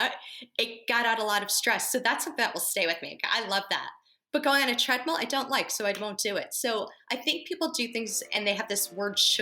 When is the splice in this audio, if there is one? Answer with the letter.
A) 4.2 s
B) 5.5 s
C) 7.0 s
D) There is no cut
D